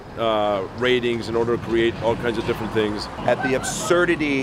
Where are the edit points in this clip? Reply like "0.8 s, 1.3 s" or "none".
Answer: 3.1 s